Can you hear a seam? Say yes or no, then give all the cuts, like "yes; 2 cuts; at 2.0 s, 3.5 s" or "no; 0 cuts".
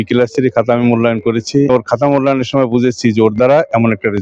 yes; 1 cut; at 1.7 s